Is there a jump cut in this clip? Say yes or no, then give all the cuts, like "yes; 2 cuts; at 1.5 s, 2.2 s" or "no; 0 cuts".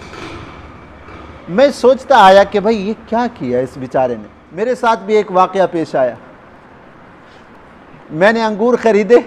yes; 1 cut; at 4.4 s